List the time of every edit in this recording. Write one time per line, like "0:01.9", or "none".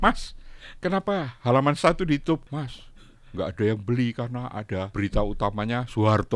0:02.5
0:04.9